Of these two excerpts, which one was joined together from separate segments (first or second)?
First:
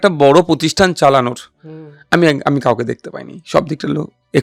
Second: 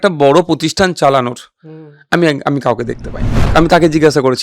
second